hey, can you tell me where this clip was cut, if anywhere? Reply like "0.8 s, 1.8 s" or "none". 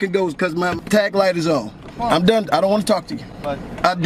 0.8 s, 1.8 s